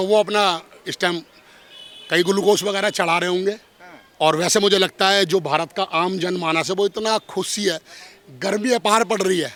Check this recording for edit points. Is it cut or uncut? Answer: uncut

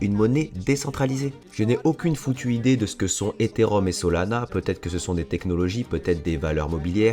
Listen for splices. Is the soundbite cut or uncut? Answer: cut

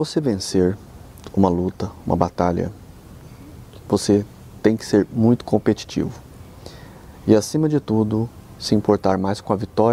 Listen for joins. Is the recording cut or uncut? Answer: uncut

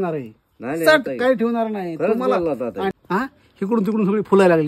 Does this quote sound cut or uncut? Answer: cut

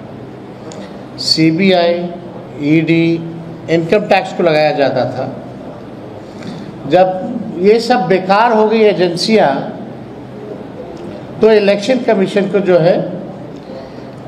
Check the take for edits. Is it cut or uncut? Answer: uncut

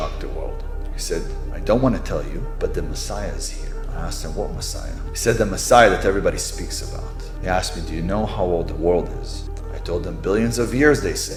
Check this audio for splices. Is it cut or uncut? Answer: uncut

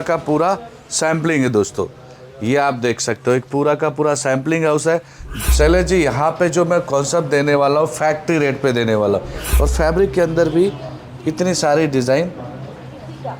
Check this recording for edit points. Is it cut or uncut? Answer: cut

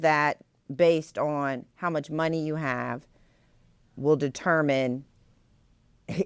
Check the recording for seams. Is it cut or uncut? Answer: uncut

